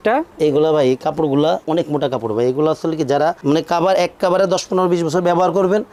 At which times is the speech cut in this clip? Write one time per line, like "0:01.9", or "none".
none